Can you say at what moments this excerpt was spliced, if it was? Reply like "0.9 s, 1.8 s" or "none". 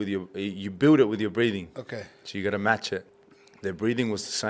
3.2 s

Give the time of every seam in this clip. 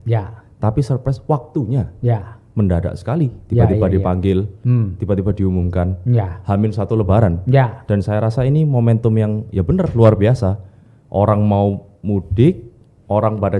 none

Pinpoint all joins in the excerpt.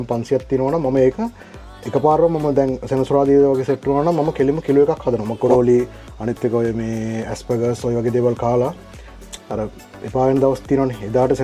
5.5 s

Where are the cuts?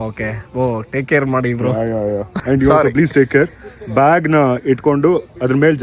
2.3 s

